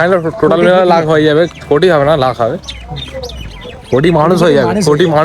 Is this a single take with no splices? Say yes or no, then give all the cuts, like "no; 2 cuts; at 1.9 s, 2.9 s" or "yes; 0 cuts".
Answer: yes; 0 cuts